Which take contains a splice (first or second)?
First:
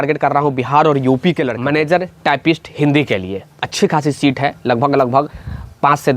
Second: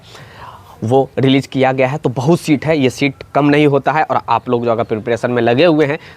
first